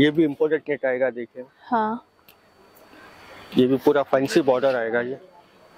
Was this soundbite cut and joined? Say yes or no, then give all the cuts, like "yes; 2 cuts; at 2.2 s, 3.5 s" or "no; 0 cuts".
no; 0 cuts